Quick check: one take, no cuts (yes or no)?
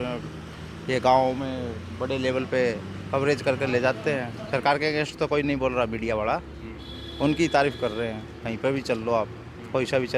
yes